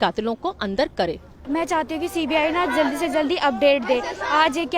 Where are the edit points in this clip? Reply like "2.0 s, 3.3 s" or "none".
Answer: 1.3 s

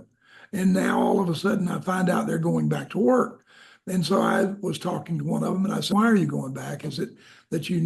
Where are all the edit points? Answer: 5.9 s

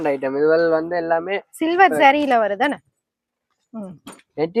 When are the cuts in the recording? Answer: none

